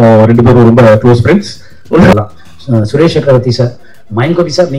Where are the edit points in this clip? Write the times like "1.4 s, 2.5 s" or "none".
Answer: 2.1 s